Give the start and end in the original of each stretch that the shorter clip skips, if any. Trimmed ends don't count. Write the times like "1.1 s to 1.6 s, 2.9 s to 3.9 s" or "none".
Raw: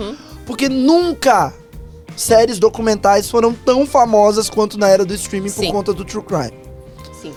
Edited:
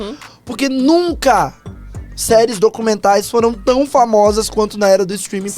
none